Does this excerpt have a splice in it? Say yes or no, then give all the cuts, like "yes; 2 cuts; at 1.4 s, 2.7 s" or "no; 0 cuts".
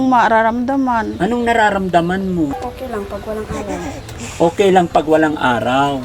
yes; 2 cuts; at 1.1 s, 2.5 s